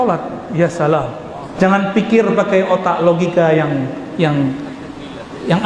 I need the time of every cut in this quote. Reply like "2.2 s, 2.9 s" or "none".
1.4 s